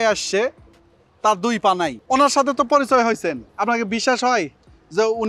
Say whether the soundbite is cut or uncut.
cut